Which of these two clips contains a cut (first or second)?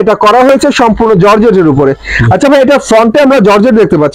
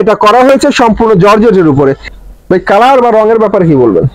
second